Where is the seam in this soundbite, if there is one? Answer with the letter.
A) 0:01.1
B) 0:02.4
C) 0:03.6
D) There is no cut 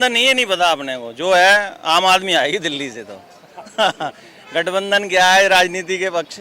D